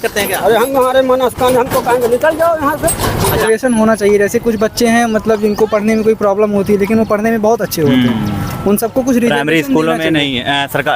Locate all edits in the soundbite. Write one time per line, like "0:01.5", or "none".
0:03.4